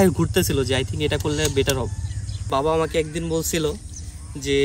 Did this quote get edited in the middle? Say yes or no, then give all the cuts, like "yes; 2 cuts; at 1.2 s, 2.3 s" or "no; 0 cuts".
yes; 1 cut; at 2.5 s